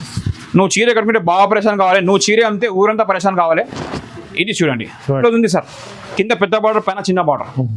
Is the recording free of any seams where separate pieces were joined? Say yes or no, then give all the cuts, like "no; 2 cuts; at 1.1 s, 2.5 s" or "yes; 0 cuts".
no; 1 cut; at 5.1 s